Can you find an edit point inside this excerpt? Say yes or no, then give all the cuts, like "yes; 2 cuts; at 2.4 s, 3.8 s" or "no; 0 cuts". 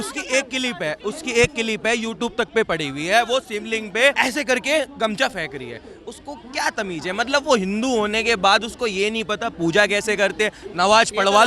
yes; 1 cut; at 4.2 s